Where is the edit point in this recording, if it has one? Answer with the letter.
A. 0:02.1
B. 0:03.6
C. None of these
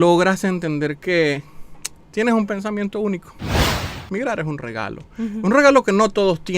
B